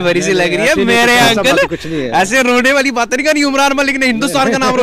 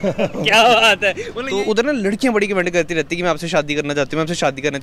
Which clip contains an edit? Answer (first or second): second